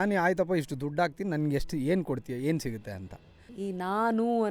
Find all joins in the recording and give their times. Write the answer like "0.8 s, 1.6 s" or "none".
3.5 s